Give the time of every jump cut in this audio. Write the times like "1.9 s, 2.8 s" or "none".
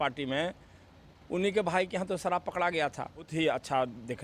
3.3 s